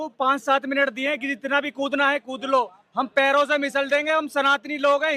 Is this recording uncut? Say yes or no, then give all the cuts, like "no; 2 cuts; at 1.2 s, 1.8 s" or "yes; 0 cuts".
yes; 0 cuts